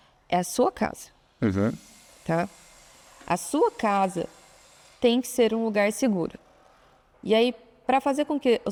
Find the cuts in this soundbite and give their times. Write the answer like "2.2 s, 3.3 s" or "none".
none